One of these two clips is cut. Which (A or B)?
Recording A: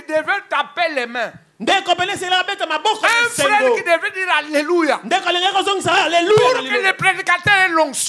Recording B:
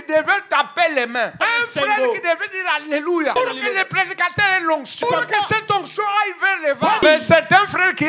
B